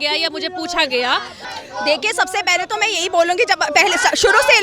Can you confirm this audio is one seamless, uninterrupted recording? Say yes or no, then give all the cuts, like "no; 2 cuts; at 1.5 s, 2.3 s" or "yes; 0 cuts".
no; 1 cut; at 1.4 s